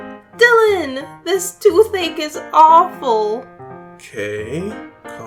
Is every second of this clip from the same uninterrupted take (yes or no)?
yes